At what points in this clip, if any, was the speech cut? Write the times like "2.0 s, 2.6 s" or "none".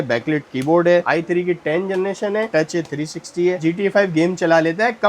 1.0 s, 2.5 s, 3.6 s